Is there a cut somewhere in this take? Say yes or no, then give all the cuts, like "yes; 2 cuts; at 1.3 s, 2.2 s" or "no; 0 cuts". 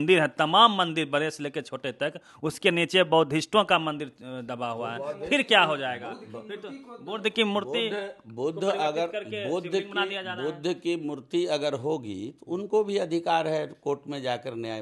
no; 0 cuts